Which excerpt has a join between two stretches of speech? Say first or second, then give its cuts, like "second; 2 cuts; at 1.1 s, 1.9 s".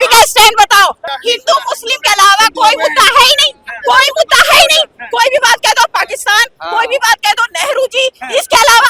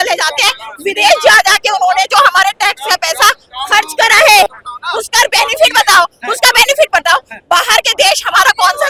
first; 1 cut; at 1.1 s